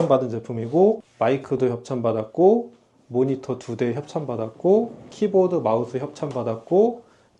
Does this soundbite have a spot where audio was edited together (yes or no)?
yes